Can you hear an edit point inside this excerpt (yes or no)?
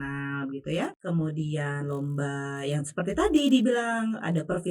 yes